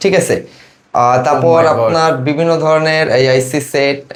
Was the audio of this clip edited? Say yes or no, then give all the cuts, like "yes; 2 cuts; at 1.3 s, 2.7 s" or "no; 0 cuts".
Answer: no; 0 cuts